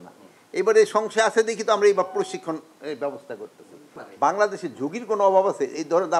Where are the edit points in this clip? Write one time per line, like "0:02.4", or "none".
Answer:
0:03.9